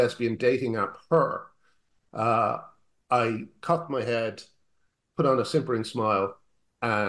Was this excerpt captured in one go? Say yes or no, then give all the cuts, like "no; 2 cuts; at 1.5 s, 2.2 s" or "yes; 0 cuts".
yes; 0 cuts